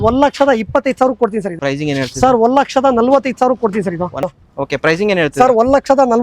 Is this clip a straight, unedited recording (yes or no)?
no